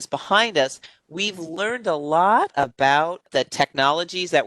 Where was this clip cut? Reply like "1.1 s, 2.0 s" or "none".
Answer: 3.3 s